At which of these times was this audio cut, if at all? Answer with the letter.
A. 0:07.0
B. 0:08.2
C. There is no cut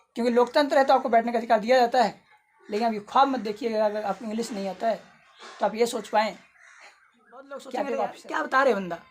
B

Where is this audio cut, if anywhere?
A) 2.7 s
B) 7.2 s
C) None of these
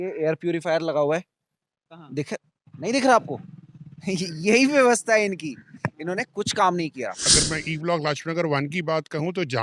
B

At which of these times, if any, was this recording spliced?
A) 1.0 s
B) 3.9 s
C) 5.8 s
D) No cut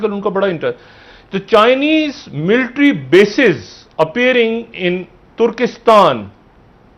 D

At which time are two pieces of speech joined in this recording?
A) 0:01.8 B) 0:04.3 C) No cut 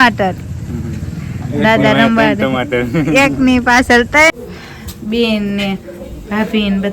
B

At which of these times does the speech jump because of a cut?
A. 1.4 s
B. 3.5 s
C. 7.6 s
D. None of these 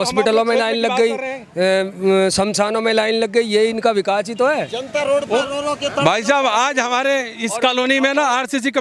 D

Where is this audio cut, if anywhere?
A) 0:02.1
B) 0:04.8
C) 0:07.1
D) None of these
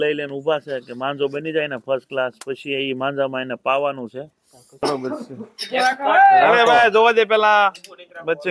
B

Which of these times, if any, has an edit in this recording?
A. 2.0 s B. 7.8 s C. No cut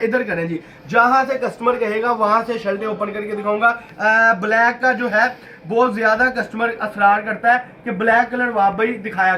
C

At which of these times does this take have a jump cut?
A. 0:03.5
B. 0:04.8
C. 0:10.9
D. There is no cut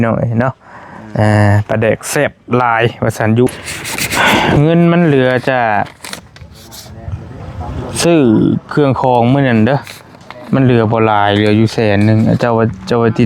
A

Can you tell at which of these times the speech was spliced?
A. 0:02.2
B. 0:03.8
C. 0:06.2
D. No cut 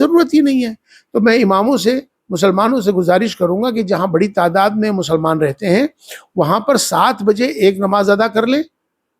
D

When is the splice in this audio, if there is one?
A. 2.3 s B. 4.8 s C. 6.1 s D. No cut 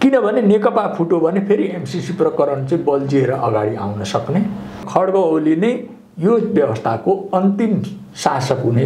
B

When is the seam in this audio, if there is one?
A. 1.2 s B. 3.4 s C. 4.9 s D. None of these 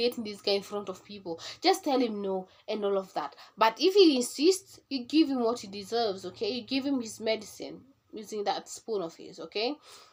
D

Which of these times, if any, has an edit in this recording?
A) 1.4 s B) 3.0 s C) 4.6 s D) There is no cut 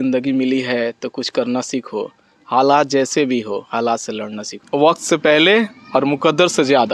C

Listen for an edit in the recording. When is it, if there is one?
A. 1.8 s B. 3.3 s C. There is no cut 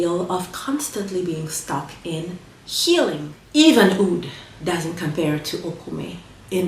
B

